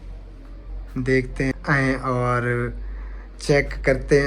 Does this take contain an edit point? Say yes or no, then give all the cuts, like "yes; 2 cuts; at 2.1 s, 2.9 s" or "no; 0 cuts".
yes; 1 cut; at 1.5 s